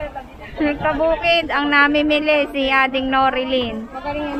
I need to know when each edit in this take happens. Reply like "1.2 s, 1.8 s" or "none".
none